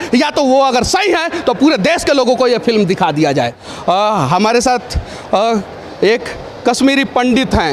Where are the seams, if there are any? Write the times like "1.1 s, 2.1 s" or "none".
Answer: 3.7 s